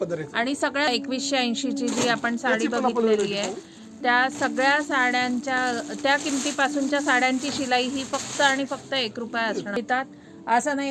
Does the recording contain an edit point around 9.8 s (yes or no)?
yes